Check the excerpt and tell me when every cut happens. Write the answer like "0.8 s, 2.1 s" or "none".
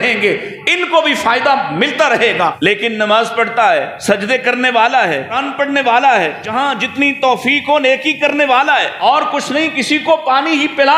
2.6 s, 3.9 s, 5.4 s, 6.4 s, 9.0 s